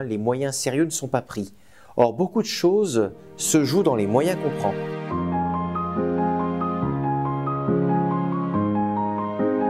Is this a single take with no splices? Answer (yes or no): no